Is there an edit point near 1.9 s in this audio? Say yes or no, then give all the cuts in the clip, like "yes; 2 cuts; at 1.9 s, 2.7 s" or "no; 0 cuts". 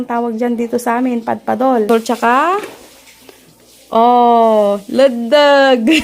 yes; 1 cut; at 1.9 s